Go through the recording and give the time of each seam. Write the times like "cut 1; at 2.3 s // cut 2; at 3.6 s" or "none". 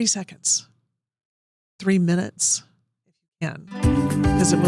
cut 1; at 3.7 s

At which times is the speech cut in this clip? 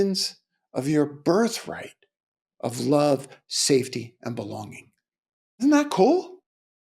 cut 1; at 5.6 s

